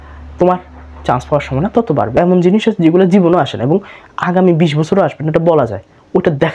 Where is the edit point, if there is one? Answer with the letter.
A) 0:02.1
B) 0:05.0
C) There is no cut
A